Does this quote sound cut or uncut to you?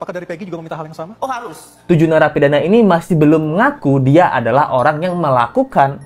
cut